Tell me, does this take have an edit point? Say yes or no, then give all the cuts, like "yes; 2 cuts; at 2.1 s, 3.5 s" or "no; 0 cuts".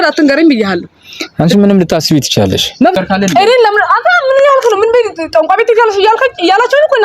yes; 1 cut; at 3.0 s